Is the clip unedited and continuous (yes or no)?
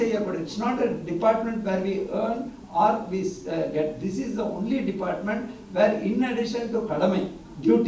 yes